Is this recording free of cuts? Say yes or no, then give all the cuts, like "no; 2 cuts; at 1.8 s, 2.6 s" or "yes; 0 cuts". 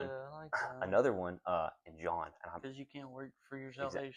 yes; 0 cuts